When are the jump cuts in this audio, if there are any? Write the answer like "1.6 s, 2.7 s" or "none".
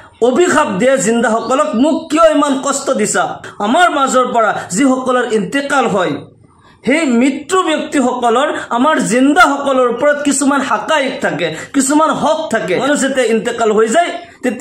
3.5 s, 12.8 s